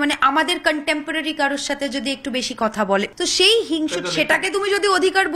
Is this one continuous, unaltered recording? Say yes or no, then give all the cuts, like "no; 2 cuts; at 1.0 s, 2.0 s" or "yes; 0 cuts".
no; 1 cut; at 3.1 s